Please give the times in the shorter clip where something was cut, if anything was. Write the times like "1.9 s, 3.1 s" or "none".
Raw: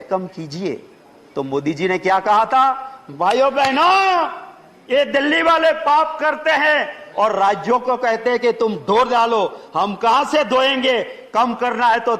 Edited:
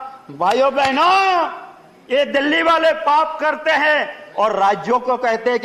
none